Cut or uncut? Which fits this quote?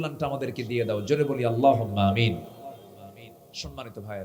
uncut